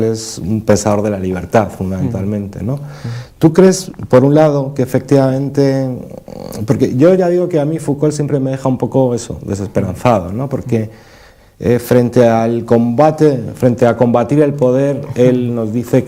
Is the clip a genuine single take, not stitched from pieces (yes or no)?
yes